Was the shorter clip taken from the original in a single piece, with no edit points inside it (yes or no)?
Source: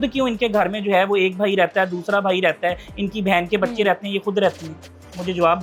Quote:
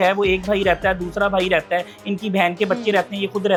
yes